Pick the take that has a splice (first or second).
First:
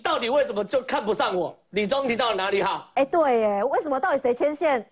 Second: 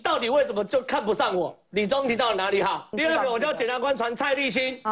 second